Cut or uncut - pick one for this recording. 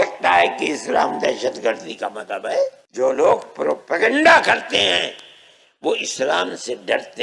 cut